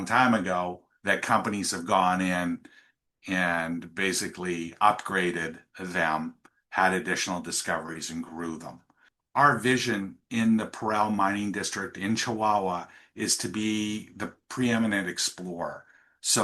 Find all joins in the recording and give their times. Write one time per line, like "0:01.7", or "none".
0:08.9